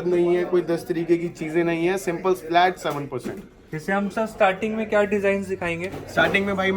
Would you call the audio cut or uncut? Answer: uncut